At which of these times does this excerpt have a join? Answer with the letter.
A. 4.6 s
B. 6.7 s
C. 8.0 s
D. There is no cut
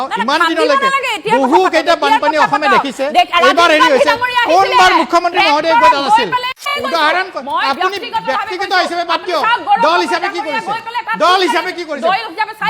B